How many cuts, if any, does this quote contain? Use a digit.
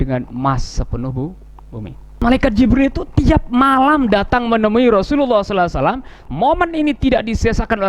2